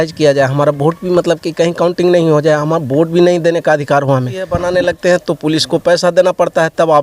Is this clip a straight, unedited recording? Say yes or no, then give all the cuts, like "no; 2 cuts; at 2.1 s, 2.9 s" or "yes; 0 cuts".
no; 1 cut; at 4.7 s